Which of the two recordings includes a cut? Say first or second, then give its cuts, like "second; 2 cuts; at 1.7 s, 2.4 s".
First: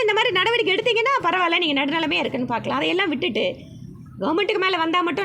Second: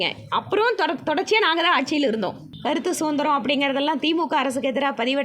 second; 1 cut; at 2.5 s